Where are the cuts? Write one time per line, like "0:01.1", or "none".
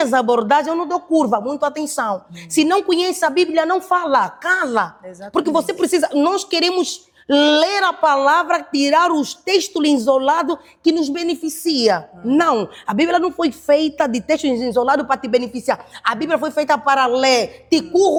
none